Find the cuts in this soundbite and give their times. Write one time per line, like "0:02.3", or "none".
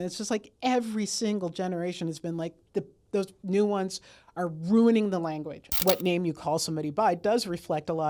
0:05.8